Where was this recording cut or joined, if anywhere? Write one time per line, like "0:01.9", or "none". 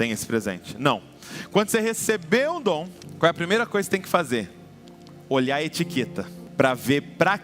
0:03.0
0:06.4